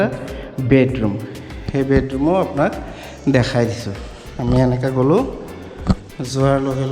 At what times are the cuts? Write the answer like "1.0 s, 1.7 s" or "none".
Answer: none